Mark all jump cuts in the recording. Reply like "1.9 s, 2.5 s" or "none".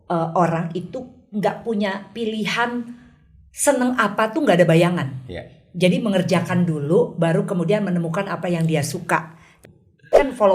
9.5 s